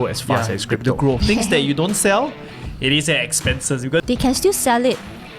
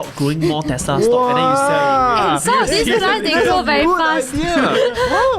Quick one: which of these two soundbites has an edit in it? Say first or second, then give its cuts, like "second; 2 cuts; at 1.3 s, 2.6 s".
first; 2 cuts; at 1.2 s, 4.0 s